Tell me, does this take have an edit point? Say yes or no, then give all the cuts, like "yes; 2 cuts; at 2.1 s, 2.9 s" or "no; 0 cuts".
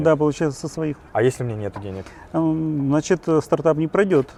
no; 0 cuts